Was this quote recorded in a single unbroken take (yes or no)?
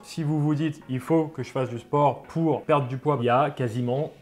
no